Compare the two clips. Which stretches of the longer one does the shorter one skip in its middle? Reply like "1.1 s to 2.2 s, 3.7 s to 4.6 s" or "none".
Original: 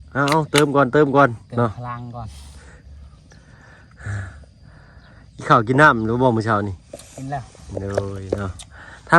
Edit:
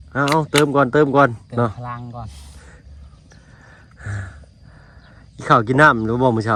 none